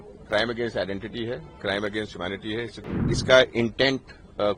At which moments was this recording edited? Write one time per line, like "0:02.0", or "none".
0:03.1

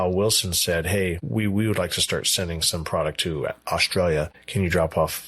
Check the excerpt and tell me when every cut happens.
0:01.2
0:04.4

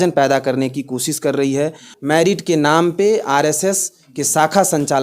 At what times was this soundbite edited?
0:01.9

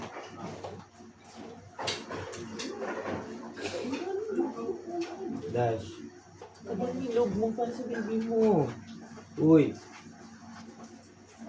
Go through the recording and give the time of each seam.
none

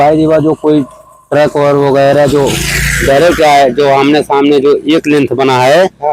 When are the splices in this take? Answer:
none

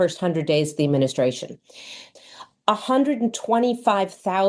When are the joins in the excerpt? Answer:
0:02.2

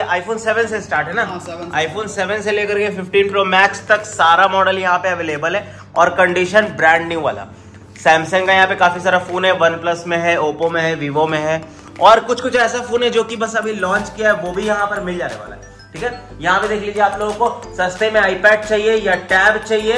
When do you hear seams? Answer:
none

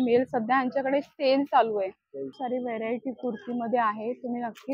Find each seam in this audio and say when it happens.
none

